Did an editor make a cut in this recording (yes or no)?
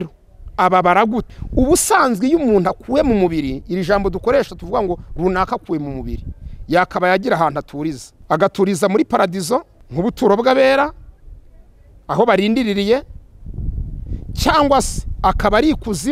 yes